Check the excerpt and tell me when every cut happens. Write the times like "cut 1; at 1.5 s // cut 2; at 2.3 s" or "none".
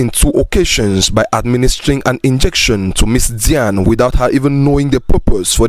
none